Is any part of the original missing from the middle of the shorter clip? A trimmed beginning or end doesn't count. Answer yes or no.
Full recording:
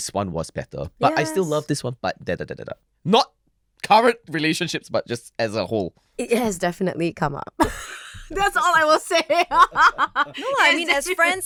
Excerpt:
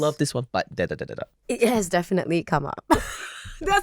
yes